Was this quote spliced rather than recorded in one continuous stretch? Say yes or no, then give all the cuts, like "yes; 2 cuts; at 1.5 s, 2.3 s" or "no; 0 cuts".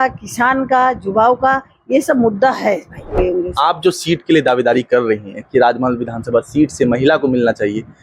yes; 1 cut; at 3.2 s